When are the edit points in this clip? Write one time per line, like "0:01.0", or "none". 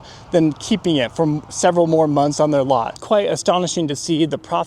0:02.9